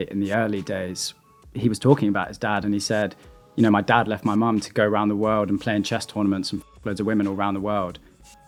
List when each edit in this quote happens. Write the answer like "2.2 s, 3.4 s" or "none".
none